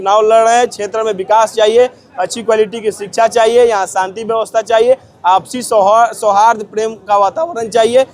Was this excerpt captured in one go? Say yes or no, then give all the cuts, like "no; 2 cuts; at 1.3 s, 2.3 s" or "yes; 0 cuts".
yes; 0 cuts